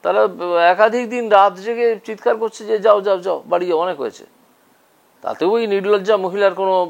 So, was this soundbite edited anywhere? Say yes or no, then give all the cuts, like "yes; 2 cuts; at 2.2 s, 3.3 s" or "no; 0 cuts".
no; 0 cuts